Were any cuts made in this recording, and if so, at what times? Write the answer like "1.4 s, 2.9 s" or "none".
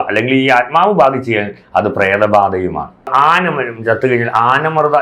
3.1 s